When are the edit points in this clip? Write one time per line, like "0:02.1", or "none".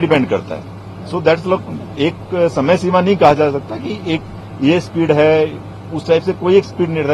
none